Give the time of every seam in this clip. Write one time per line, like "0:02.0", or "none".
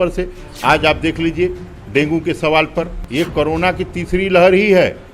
0:03.0